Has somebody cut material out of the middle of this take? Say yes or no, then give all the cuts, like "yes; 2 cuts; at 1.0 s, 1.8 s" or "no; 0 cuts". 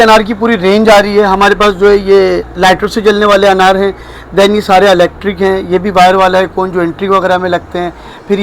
no; 0 cuts